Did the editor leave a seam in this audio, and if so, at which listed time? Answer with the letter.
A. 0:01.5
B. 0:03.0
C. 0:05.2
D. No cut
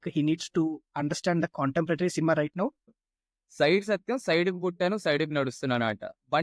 B